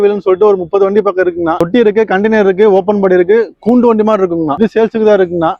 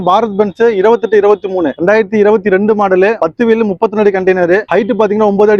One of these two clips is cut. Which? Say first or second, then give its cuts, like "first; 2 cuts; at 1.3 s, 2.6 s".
first; 2 cuts; at 1.6 s, 4.5 s